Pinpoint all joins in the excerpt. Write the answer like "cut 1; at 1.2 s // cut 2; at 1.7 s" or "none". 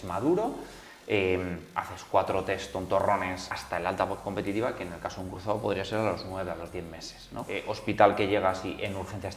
cut 1; at 3.5 s // cut 2; at 7.7 s